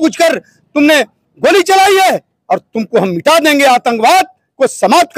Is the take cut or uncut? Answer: uncut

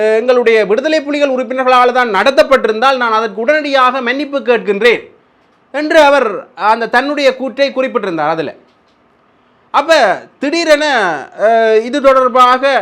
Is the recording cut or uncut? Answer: uncut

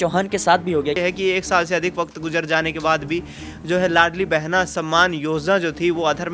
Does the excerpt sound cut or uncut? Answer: cut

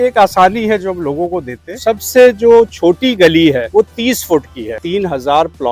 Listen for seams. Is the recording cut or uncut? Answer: cut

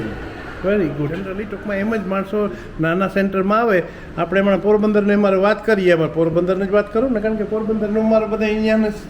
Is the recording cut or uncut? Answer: cut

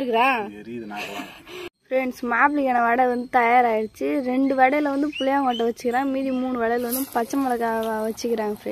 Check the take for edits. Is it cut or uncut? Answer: cut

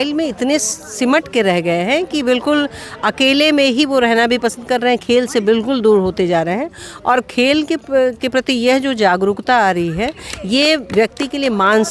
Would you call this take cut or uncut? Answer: uncut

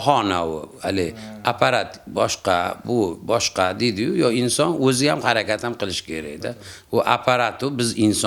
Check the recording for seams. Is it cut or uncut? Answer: uncut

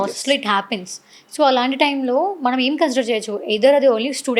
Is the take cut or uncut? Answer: uncut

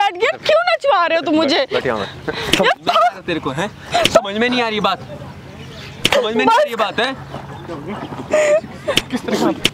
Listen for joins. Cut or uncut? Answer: uncut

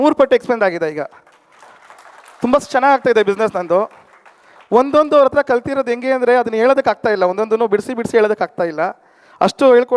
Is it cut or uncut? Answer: uncut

